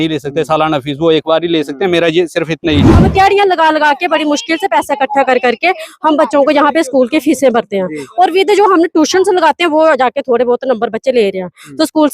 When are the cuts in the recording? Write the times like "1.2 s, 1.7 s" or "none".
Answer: 3.0 s